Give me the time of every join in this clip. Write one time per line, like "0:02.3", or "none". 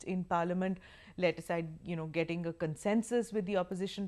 0:01.8